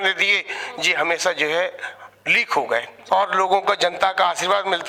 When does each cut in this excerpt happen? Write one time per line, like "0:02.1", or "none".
0:02.9